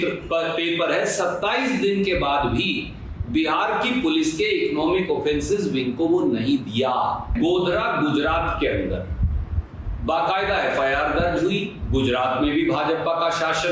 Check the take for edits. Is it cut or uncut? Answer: cut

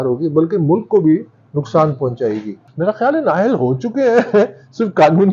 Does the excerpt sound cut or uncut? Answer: cut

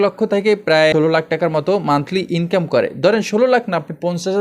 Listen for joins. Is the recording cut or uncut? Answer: cut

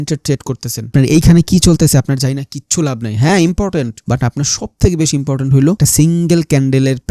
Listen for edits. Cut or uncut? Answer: cut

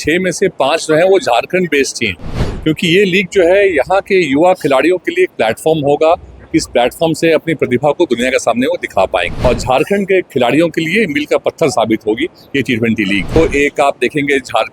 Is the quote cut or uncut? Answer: cut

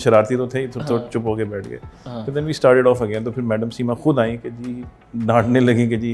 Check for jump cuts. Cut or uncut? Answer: uncut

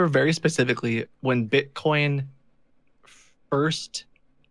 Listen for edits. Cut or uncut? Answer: uncut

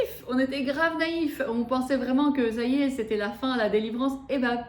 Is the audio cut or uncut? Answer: uncut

